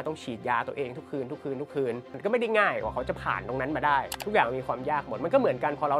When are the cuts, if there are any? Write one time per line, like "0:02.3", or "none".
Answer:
0:02.1